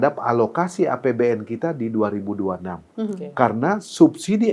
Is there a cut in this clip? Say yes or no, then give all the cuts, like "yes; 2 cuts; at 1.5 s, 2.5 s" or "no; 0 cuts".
no; 0 cuts